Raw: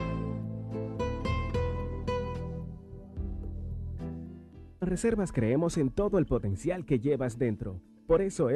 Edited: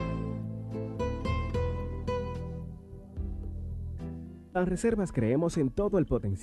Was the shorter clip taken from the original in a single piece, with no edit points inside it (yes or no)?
no